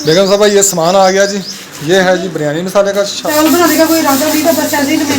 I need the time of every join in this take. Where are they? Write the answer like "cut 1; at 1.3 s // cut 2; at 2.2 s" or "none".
cut 1; at 3.2 s